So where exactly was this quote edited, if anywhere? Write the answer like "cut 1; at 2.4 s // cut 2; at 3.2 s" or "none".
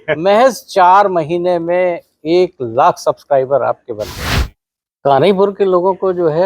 cut 1; at 4.3 s